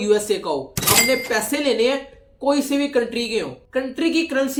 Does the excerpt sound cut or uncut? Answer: uncut